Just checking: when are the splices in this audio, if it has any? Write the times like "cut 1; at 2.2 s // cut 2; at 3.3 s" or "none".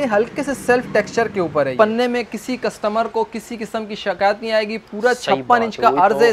cut 1; at 1.7 s